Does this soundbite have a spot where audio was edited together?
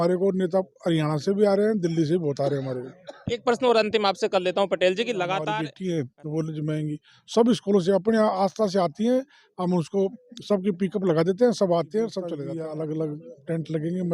yes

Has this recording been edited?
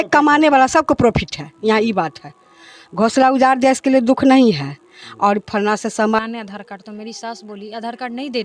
yes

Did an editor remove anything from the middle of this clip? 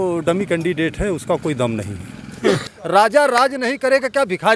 yes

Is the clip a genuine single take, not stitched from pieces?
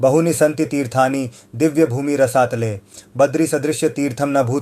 yes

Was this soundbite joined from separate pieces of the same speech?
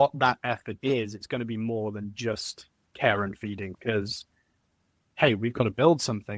yes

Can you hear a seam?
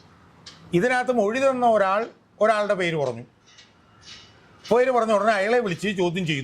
no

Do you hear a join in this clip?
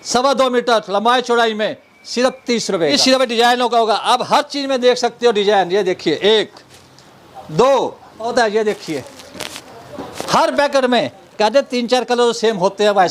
yes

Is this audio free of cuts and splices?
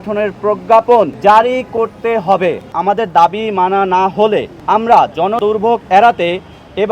no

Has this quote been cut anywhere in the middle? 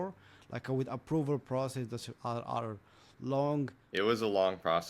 yes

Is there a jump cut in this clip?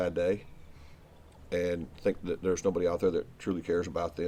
no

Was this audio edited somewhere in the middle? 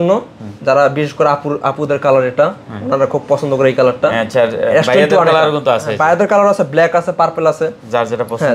no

